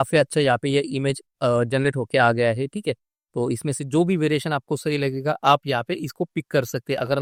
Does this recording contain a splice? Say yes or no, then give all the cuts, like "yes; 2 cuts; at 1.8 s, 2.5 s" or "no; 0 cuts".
no; 0 cuts